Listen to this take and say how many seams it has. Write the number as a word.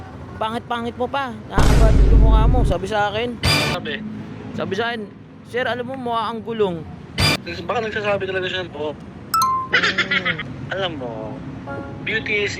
three